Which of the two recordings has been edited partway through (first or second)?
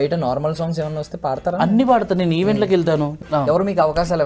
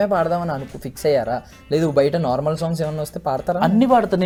first